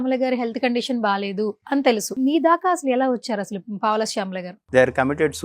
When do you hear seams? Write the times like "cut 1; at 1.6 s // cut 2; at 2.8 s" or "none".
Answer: cut 1; at 2.1 s // cut 2; at 4.5 s

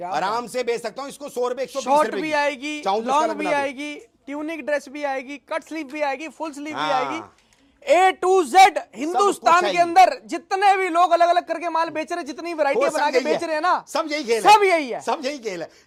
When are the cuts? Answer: none

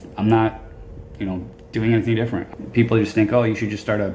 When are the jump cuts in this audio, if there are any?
cut 1; at 2.5 s

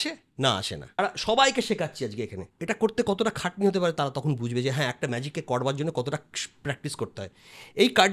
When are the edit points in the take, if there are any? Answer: cut 1; at 1.0 s // cut 2; at 2.5 s

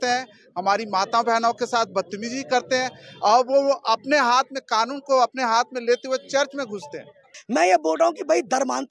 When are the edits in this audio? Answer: cut 1; at 7.3 s

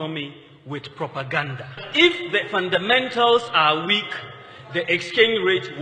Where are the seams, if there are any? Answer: cut 1; at 1.9 s

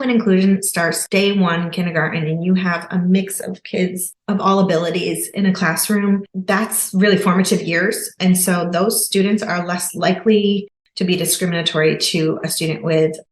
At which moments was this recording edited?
cut 1; at 1.0 s

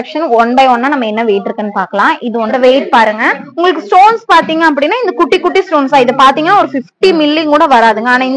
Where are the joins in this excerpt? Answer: cut 1; at 2.6 s

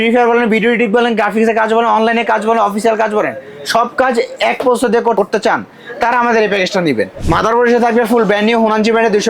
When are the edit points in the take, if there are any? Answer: cut 1; at 5.2 s // cut 2; at 7.2 s

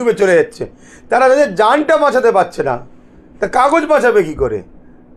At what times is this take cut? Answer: none

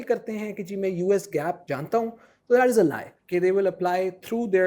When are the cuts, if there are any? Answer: cut 1; at 1.7 s // cut 2; at 3.1 s

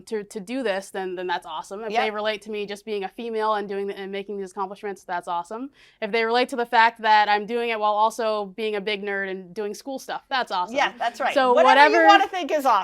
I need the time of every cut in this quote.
none

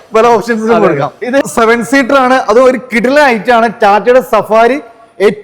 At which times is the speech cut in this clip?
cut 1; at 1.4 s

